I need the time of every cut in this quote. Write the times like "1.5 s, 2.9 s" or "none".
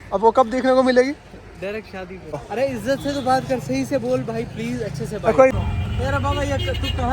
2.5 s, 5.5 s